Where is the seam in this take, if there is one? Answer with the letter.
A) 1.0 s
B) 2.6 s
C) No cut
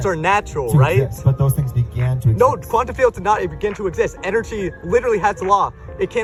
C